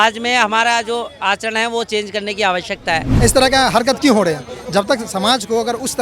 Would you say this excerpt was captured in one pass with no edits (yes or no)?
no